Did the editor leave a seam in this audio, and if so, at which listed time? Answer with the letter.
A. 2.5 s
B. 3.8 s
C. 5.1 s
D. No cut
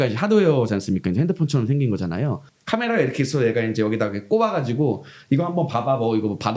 A